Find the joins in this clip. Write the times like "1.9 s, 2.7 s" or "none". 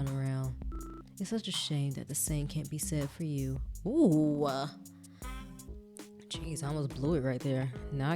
5.7 s

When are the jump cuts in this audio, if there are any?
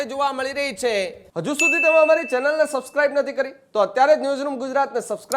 1.2 s

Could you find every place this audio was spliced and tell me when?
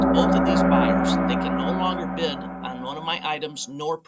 none

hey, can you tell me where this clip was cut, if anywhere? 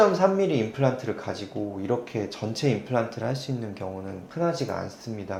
none

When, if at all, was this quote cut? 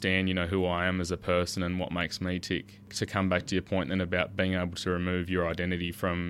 2.9 s

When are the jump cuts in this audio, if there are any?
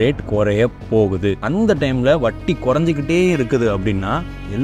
1.4 s

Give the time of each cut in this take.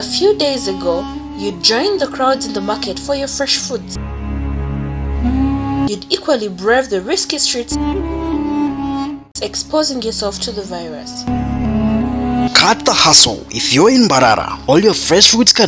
none

